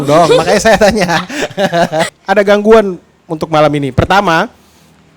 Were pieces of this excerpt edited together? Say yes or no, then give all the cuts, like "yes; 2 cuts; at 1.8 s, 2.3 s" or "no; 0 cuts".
yes; 1 cut; at 2.1 s